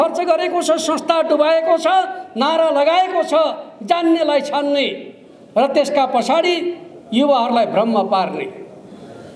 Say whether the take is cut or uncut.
uncut